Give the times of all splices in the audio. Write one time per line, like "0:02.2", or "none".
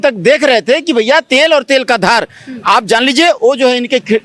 none